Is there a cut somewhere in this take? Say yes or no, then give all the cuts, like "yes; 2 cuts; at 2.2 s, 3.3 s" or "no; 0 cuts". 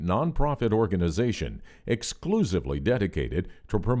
no; 0 cuts